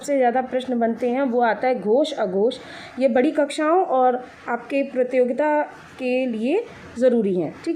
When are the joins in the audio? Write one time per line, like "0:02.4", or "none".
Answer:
none